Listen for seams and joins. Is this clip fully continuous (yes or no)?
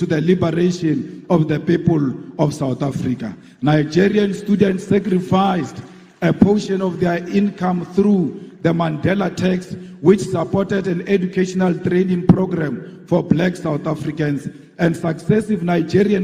yes